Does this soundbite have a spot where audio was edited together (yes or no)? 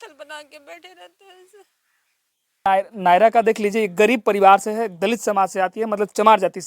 yes